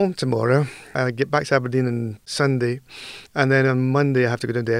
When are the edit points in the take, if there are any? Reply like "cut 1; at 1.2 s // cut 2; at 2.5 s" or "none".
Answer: cut 1; at 0.9 s // cut 2; at 2.2 s